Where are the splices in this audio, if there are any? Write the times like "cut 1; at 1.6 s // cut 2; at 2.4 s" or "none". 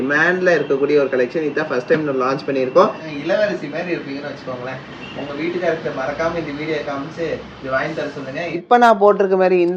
cut 1; at 3.0 s // cut 2; at 8.6 s